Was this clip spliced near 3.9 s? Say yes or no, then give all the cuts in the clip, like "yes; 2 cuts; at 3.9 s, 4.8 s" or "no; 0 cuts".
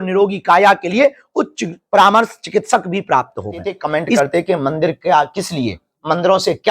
yes; 1 cut; at 3.9 s